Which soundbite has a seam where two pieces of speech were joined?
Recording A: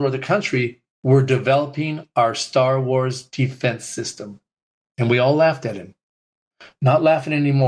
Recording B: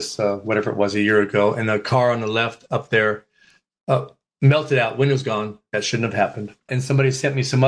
B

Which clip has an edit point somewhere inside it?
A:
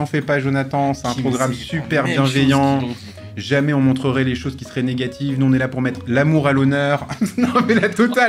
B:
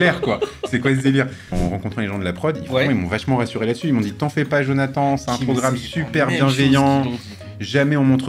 B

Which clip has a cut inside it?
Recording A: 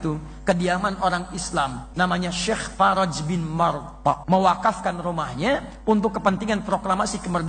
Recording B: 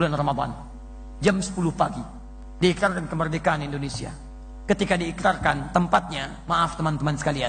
A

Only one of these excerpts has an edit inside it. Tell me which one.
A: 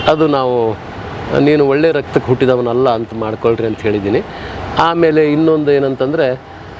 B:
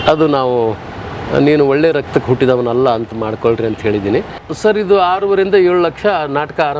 B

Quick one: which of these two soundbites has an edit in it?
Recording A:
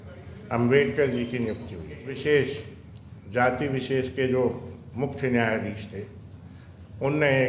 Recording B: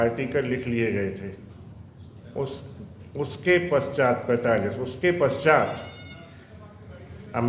A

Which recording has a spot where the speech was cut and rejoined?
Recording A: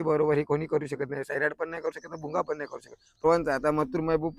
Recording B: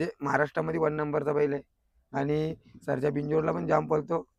A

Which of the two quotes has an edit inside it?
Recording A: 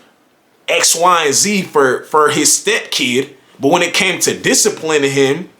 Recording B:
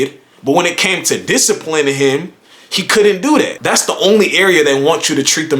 B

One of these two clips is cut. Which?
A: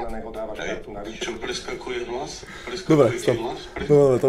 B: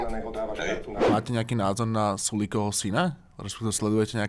B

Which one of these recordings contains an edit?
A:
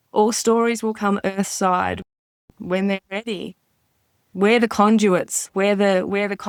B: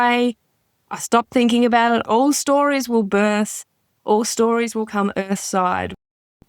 B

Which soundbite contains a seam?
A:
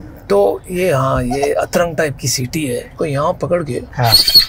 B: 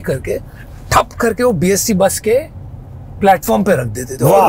A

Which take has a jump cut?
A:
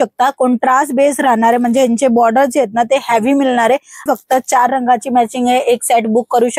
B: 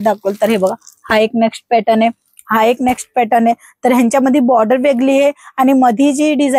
A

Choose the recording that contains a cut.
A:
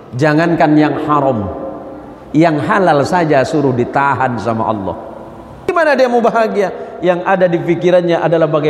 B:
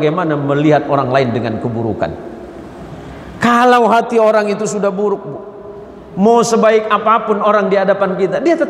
A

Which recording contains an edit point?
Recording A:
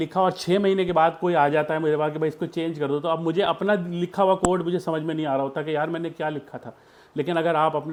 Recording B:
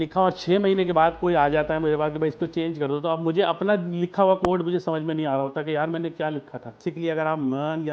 B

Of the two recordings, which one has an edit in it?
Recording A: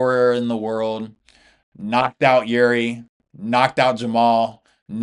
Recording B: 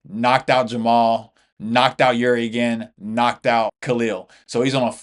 B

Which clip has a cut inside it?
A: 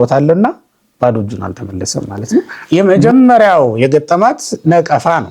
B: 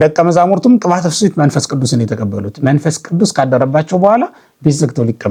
A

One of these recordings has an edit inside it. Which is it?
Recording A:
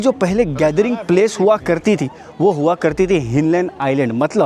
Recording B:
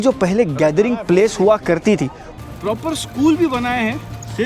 B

